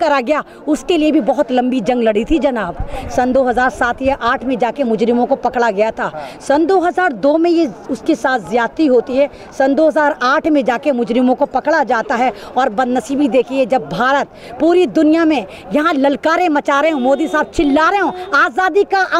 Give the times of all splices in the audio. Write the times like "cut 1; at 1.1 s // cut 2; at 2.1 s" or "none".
none